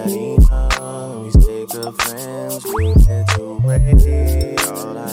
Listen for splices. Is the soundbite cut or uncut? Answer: uncut